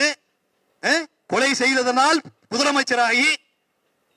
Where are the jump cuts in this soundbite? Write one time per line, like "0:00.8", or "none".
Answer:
none